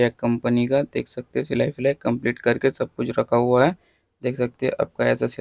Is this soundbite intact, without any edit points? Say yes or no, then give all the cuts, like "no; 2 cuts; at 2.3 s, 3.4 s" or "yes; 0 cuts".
yes; 0 cuts